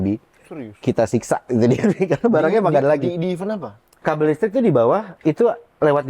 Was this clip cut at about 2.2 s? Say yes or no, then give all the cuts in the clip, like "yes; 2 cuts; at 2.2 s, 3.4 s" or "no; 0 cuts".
no; 2 cuts; at 4.0 s, 5.1 s